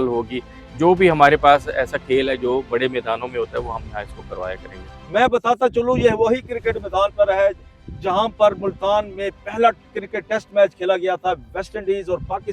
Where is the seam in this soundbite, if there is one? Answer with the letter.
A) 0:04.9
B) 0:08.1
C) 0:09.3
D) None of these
A